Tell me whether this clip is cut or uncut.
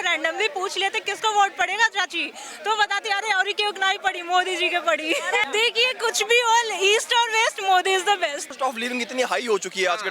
cut